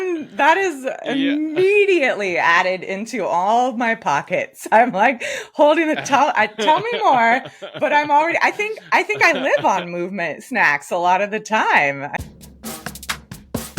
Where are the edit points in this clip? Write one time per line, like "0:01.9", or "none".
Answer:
0:12.2